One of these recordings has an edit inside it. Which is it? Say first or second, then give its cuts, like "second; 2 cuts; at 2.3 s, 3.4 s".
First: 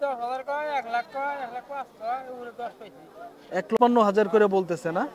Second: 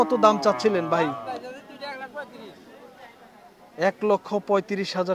first; 1 cut; at 3.8 s